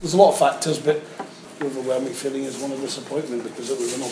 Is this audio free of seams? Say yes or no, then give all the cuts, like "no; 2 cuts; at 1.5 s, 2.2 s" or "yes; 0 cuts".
no; 1 cut; at 1.5 s